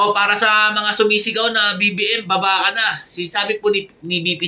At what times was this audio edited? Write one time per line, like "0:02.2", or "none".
none